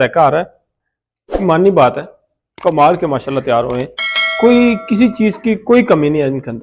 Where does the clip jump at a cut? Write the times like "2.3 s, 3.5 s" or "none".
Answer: none